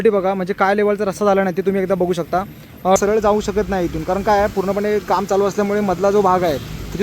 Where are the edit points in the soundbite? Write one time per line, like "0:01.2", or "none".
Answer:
0:03.0